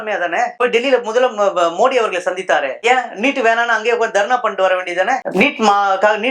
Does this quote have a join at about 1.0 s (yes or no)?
no